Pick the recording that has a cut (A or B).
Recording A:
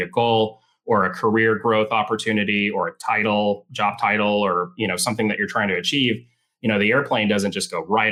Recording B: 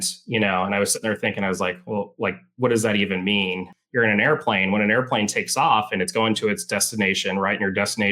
B